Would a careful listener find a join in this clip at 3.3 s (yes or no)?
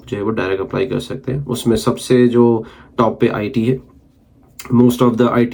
no